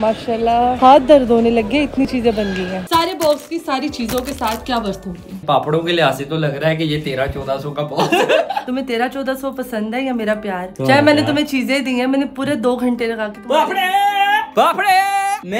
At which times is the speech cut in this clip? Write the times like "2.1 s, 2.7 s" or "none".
2.8 s, 5.4 s, 8.7 s